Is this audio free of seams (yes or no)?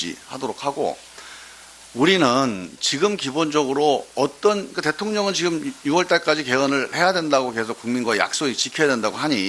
yes